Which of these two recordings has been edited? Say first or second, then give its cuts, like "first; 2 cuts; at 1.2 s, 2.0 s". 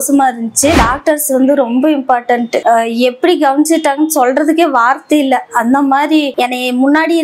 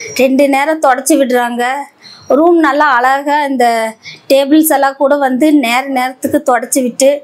first; 2 cuts; at 0.7 s, 6.3 s